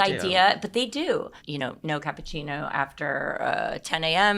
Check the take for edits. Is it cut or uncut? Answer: cut